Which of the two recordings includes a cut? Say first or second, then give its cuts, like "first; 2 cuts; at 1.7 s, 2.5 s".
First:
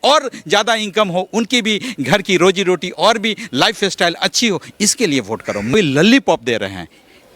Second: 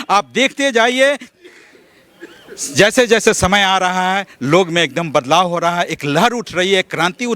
first; 1 cut; at 5.7 s